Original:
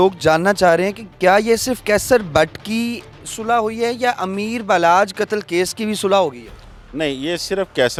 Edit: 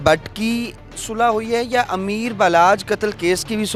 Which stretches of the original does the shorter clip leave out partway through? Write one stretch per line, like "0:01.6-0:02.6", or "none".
none